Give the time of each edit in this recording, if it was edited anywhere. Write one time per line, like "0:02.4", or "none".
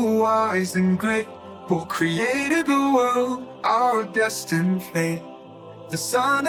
none